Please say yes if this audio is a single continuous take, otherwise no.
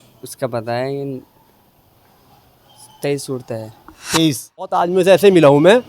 no